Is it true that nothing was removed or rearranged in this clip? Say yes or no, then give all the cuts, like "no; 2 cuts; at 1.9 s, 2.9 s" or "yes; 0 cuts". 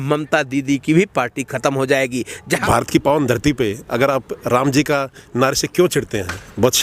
no; 1 cut; at 2.6 s